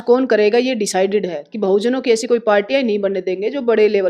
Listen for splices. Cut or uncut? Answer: uncut